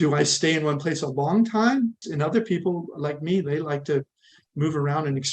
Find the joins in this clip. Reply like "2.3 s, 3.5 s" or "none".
2.0 s